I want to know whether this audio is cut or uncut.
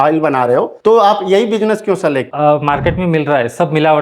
cut